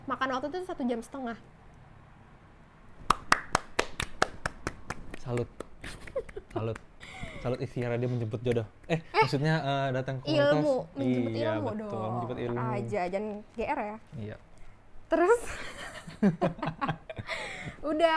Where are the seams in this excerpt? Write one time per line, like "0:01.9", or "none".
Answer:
none